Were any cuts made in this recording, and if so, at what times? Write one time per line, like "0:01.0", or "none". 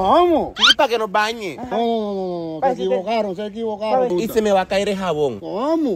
none